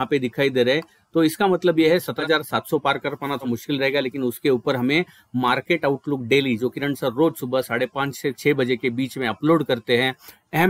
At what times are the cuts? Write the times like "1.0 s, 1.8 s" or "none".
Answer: 2.2 s, 3.4 s

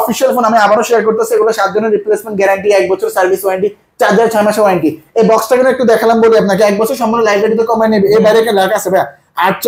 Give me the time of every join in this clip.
none

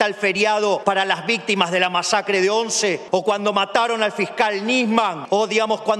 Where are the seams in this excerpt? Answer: 0.8 s, 3.0 s, 5.2 s

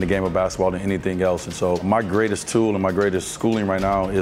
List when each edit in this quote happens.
1.8 s, 3.3 s

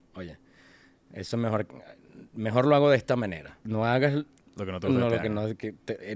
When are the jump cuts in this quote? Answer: 3.6 s

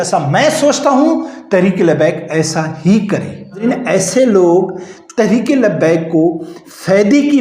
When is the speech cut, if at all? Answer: 3.6 s

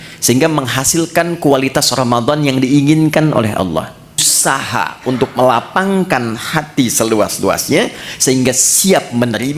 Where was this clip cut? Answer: 4.3 s

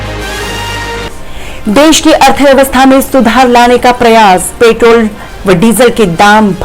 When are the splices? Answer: 1.1 s

